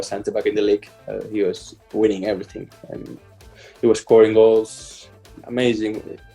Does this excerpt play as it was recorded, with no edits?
yes; 0 cuts

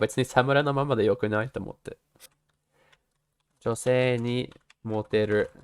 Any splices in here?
yes; 1 cut; at 2.3 s

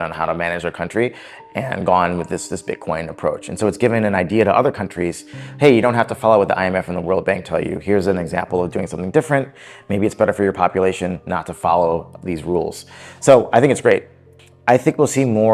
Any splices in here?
no; 0 cuts

